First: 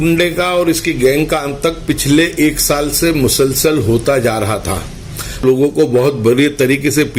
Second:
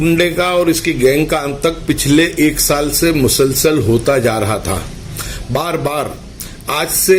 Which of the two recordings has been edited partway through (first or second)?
first